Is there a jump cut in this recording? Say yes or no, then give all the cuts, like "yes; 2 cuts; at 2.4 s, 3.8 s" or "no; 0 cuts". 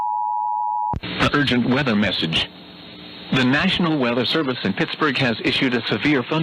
yes; 1 cut; at 0.9 s